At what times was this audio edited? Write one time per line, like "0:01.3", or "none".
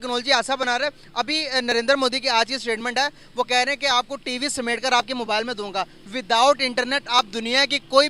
none